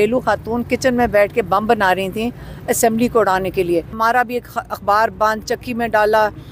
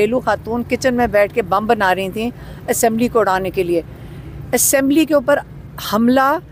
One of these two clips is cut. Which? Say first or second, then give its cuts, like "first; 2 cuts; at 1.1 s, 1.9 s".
first; 1 cut; at 4.0 s